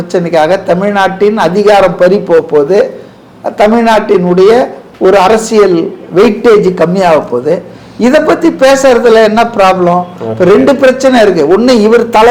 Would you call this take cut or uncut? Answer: uncut